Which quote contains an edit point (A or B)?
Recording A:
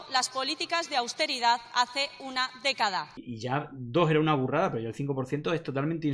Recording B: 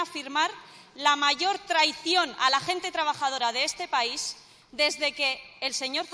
A